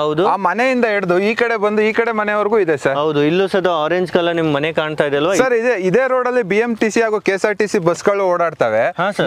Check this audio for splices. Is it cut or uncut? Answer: cut